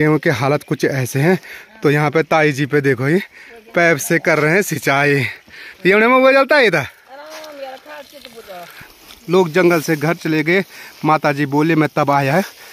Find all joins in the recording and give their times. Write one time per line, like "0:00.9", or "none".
0:08.8